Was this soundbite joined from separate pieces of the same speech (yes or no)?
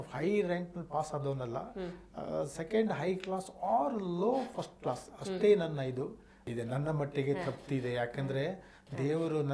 yes